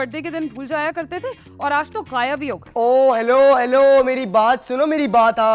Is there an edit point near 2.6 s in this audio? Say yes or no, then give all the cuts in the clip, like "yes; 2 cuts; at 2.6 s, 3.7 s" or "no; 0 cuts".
yes; 1 cut; at 2.6 s